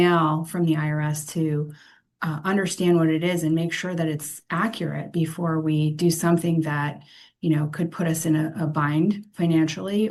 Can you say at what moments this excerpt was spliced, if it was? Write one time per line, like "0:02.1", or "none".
none